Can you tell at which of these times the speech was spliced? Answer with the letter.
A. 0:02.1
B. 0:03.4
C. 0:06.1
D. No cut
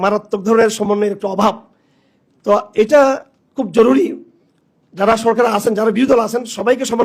D